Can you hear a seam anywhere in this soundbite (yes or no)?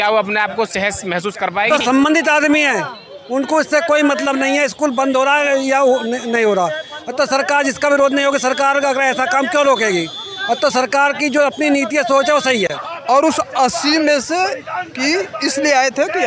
yes